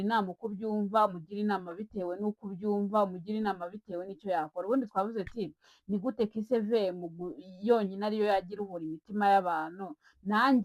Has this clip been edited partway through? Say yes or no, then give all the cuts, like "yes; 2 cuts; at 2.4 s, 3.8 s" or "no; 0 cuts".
no; 0 cuts